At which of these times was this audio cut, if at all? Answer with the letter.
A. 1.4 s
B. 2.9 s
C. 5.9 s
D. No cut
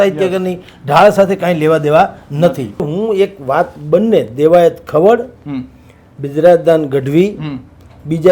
B